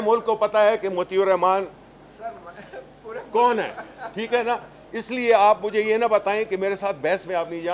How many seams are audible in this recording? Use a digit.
0